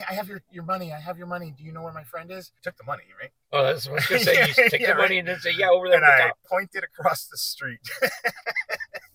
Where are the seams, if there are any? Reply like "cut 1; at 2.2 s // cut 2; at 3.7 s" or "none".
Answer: cut 1; at 2.5 s